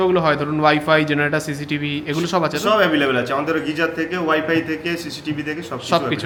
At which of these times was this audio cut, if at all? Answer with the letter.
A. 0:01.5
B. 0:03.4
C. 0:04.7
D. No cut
D